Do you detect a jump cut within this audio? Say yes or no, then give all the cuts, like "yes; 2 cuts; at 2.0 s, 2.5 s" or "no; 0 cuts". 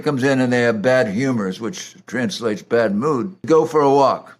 yes; 1 cut; at 3.4 s